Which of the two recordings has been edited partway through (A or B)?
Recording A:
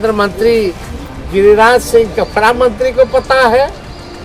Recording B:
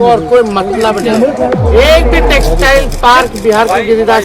B